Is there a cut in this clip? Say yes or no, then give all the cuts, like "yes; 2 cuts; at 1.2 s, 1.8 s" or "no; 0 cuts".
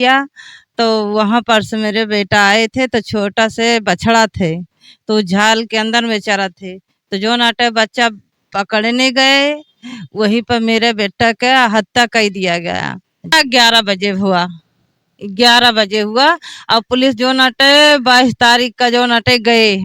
yes; 1 cut; at 13.3 s